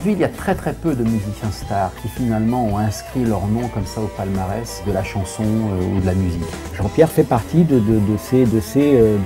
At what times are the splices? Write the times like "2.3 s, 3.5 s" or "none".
6.8 s